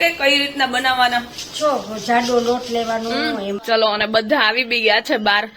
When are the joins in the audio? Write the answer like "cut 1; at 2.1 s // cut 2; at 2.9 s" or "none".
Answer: cut 1; at 3.6 s